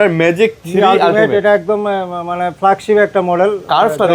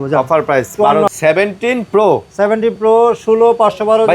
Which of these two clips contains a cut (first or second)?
second